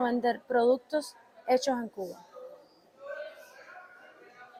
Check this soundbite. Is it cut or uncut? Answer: uncut